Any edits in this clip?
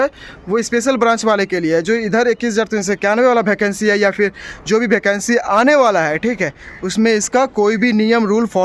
no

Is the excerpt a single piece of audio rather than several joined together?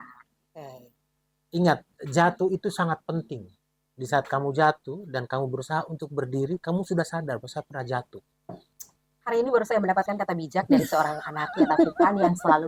yes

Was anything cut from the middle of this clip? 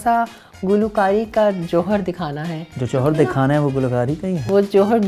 yes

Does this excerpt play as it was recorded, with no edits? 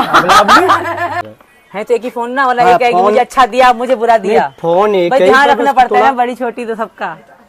no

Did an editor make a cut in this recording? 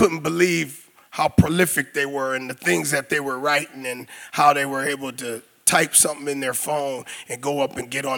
no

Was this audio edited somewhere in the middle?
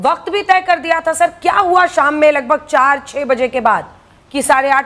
no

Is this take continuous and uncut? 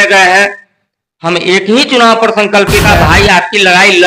no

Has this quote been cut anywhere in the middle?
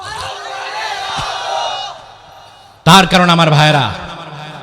no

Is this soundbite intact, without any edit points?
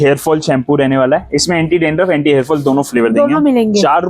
yes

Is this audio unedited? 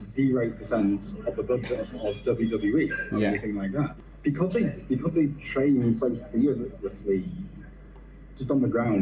no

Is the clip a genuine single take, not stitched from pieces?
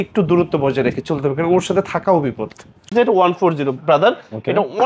no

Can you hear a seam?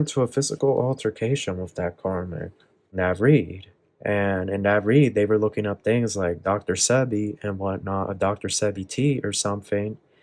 yes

